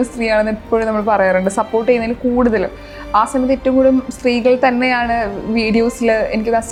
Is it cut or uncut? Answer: uncut